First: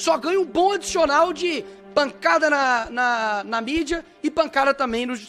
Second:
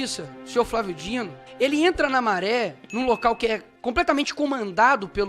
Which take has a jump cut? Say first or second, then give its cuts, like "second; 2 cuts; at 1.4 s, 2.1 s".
second; 2 cuts; at 1.4 s, 3.7 s